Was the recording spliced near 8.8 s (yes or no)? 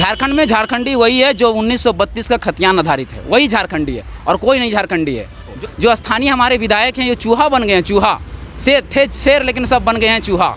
no